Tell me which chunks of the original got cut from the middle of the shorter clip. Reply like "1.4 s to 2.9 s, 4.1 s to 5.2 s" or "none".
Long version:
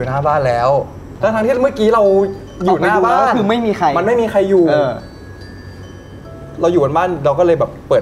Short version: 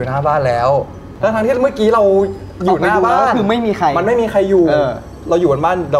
5.1 s to 6.4 s

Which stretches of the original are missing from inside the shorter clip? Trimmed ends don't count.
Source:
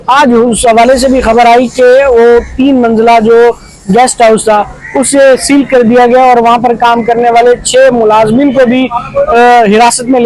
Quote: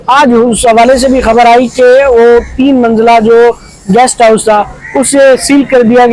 none

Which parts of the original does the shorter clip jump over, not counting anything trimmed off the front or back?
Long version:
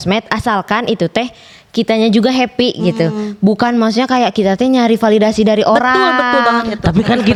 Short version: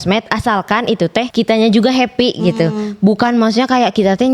1.3 s to 1.7 s

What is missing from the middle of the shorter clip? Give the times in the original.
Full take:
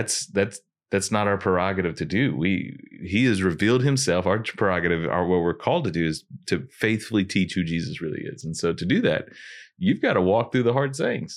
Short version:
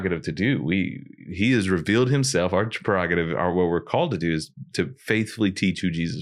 none

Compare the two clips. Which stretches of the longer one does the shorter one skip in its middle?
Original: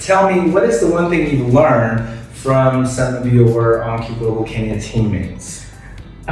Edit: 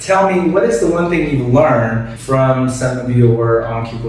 2.1 s to 2.3 s

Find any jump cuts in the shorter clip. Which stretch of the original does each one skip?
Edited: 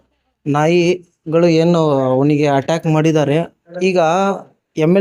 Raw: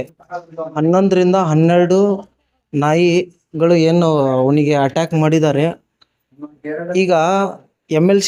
5.9 s to 6.8 s

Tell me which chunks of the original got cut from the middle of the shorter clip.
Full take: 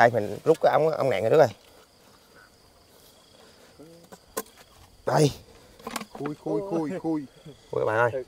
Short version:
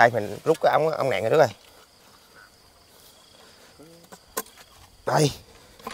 none

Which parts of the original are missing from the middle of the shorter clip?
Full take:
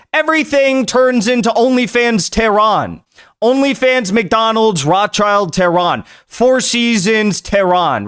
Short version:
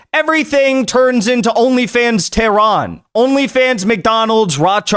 3.0 s to 3.2 s

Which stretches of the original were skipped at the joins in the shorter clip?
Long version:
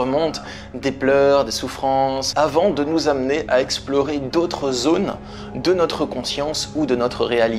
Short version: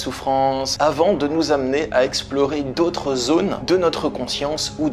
5.2 s to 5.6 s

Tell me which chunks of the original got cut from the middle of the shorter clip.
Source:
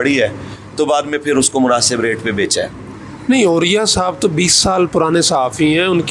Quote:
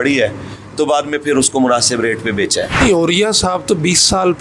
2.8 s to 3.3 s

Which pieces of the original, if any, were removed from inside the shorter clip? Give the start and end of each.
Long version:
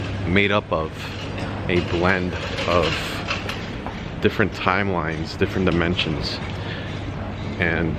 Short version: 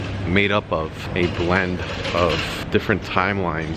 1.0 s to 1.5 s, 3.1 s to 4.1 s

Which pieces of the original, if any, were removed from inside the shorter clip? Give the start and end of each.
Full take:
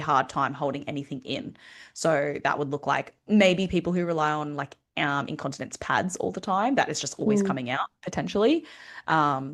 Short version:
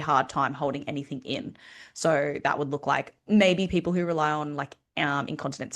none

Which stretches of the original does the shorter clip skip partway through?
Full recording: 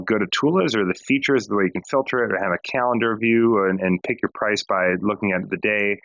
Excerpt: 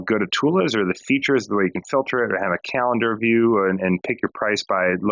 none

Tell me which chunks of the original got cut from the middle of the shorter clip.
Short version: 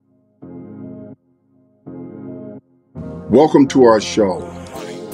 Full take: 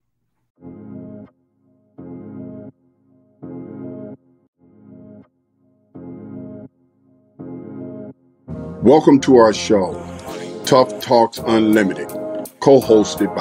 4.3 s to 8.3 s

